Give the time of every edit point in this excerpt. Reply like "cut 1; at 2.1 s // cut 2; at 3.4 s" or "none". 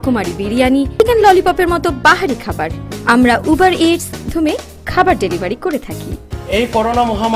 cut 1; at 1.0 s // cut 2; at 4.3 s